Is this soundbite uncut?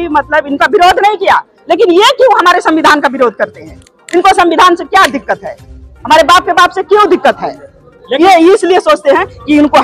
yes; 0 cuts

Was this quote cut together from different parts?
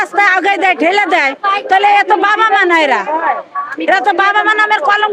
no; 0 cuts

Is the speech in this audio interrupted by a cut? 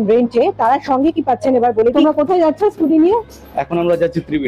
yes; 1 cut; at 2.0 s

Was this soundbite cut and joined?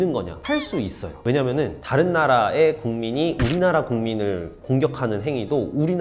no; 0 cuts

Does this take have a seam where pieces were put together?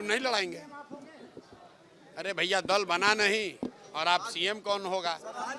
no; 0 cuts

